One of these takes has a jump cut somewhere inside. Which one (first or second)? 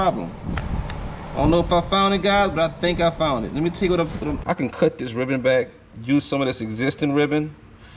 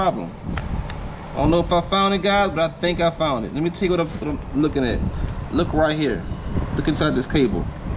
first